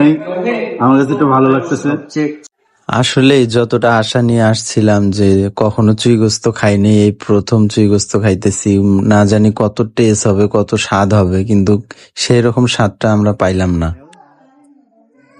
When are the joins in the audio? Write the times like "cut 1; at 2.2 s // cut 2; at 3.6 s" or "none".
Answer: none